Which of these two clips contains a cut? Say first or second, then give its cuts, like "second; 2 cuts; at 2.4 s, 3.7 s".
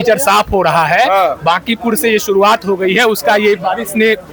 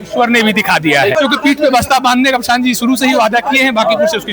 second; 1 cut; at 1.1 s